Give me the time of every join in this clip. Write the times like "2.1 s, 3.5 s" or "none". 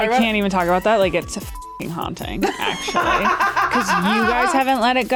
none